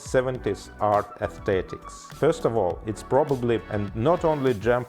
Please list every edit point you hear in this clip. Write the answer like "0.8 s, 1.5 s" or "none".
3.6 s